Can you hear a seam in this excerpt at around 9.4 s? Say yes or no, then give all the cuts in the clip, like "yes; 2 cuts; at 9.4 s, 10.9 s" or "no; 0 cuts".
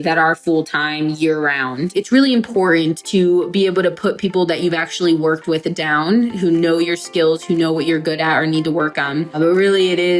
yes; 3 cuts; at 1.9 s, 3.0 s, 9.4 s